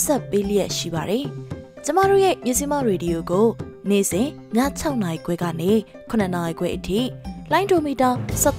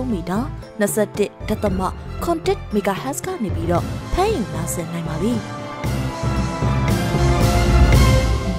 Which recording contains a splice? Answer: second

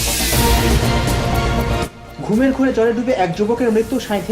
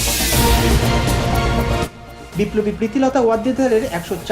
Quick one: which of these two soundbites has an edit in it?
first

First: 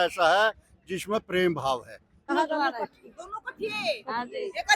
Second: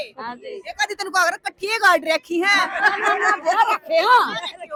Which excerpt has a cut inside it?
first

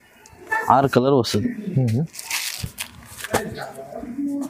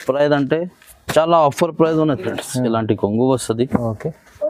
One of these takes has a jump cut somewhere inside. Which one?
second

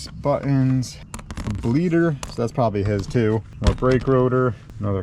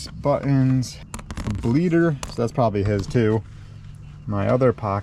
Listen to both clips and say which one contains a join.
first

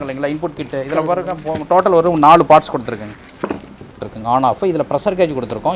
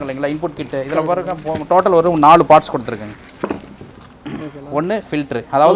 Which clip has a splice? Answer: first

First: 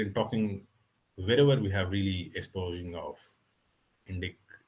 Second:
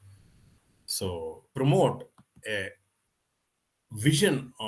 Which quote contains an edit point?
second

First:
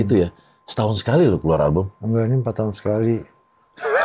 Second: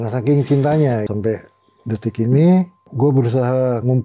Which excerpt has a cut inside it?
second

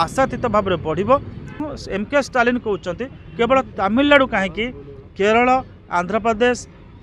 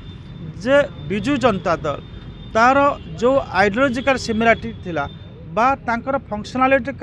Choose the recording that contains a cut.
first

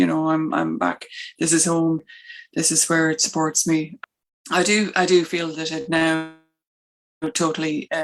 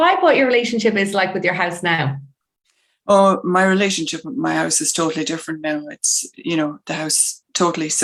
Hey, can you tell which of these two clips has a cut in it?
first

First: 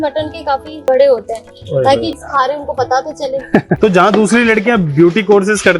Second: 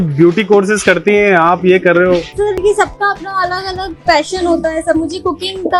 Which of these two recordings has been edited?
first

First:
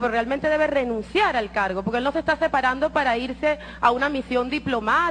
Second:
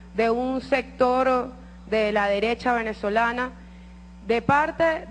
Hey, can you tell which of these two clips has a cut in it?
second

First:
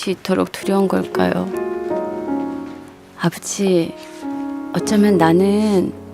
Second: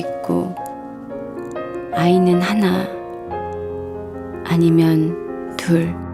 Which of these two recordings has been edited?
first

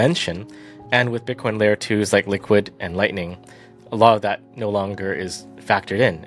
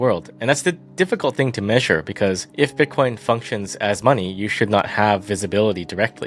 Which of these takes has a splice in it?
second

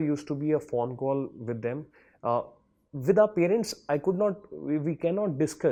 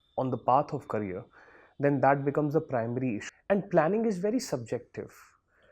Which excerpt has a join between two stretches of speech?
second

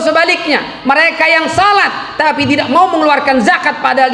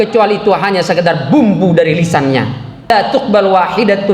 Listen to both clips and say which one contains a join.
second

